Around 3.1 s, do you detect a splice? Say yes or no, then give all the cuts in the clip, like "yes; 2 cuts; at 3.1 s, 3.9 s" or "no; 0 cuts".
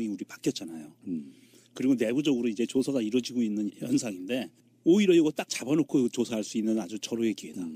yes; 1 cut; at 3.1 s